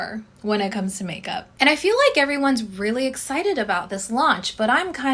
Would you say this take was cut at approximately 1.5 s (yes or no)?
yes